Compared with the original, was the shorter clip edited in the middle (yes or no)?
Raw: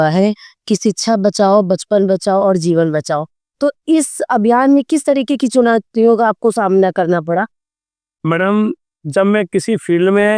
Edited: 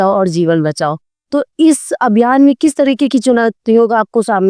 no